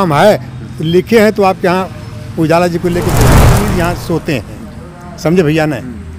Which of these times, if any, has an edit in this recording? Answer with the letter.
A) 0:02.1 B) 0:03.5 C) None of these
B